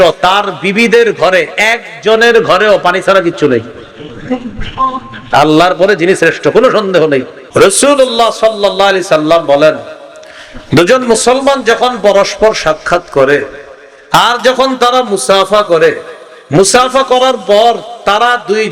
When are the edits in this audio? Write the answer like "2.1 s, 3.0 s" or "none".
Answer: 7.4 s